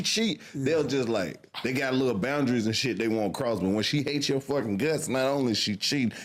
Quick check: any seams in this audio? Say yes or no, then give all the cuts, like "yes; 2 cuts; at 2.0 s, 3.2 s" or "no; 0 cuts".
no; 0 cuts